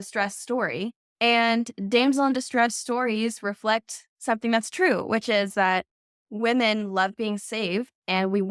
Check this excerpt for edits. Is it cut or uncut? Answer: cut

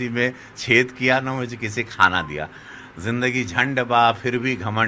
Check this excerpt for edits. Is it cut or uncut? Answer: uncut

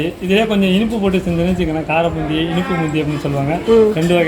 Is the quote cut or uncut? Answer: uncut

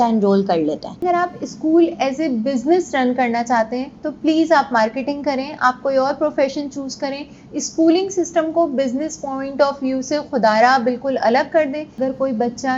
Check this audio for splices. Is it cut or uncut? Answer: cut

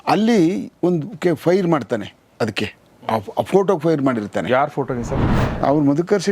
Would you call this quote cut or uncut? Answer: cut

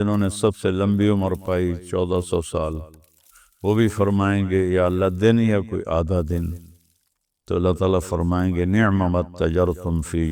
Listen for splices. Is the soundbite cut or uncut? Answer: uncut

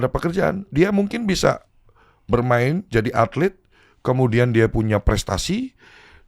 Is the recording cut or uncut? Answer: uncut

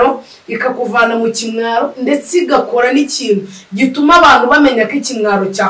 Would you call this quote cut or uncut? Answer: uncut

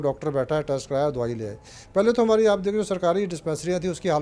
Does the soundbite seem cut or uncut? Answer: uncut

